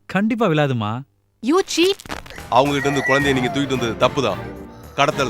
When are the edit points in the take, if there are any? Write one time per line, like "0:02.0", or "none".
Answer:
0:02.1